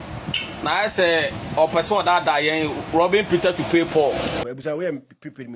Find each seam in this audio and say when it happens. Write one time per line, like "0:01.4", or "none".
0:04.4